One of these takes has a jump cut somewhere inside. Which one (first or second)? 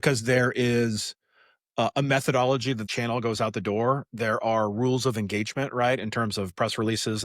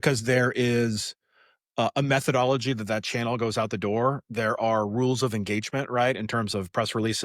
first